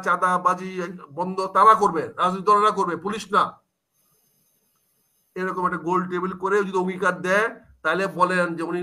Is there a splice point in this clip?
no; 0 cuts

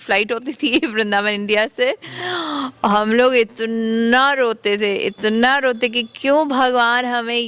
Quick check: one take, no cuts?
yes; 0 cuts

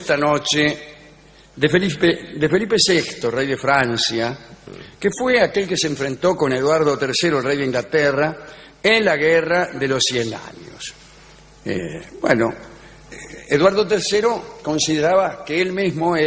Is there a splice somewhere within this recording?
no; 0 cuts

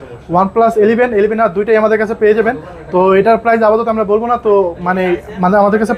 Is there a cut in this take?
no; 0 cuts

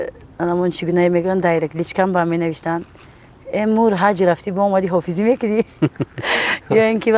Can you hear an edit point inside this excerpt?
no; 0 cuts

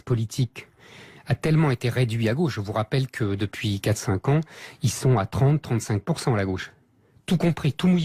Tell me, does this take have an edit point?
yes; 1 cut; at 2.2 s

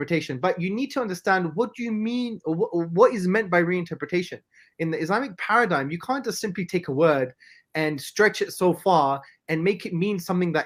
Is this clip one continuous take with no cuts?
yes; 0 cuts

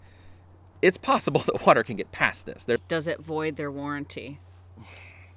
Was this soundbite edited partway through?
yes; 1 cut; at 2.8 s

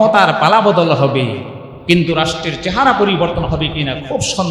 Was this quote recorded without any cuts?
yes; 0 cuts

